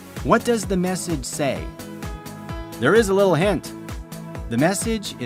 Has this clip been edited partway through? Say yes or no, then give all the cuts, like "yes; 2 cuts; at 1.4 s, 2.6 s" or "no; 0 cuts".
no; 0 cuts